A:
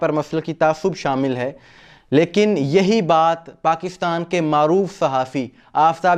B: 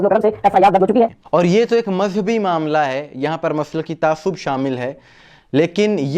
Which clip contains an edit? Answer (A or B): B